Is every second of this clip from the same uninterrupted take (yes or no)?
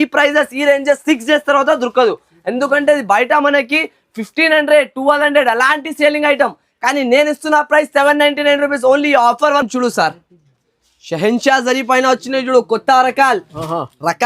yes